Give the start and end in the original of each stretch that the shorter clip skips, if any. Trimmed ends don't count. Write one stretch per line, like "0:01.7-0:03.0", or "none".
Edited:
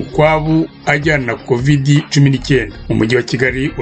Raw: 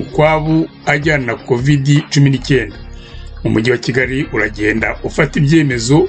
0:02.8-0:03.3